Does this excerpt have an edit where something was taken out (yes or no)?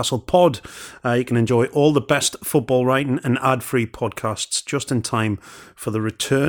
yes